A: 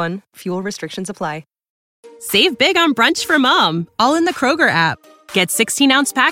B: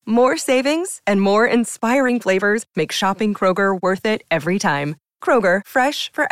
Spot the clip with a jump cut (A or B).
A